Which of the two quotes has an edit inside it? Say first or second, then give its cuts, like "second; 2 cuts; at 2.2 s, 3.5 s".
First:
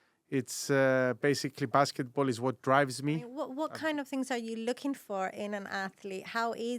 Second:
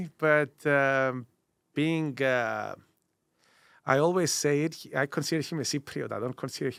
first; 1 cut; at 3.4 s